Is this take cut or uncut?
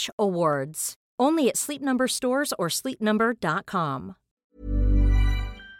cut